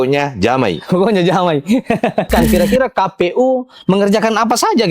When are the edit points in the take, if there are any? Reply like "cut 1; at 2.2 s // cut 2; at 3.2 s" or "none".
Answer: cut 1; at 2.4 s